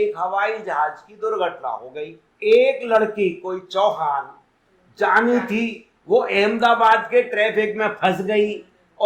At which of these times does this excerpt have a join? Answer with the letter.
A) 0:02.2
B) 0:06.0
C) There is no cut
C